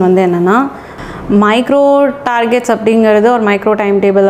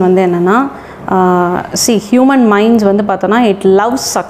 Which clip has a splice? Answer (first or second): first